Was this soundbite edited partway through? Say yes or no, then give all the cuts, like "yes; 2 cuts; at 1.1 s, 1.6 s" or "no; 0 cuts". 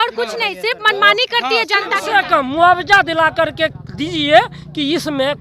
yes; 1 cut; at 2.0 s